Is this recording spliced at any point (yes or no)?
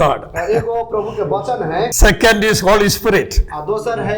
yes